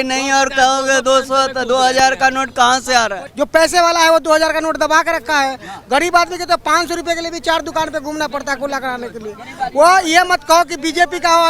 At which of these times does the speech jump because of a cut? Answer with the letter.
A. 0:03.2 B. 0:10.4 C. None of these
A